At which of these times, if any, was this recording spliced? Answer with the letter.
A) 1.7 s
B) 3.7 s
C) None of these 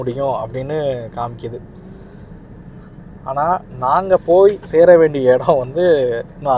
C